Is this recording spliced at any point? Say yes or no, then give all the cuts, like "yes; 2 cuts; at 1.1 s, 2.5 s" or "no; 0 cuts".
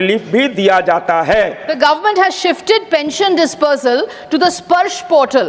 yes; 1 cut; at 1.6 s